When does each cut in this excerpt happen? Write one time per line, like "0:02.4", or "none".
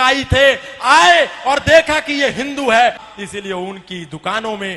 0:03.0